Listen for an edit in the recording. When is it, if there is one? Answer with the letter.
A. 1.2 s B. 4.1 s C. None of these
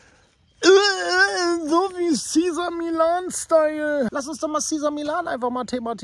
B